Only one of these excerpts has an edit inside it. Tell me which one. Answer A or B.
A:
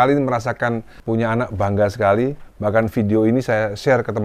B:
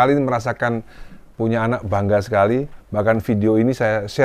A